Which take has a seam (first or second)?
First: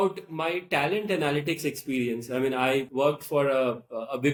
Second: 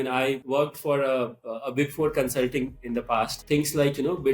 second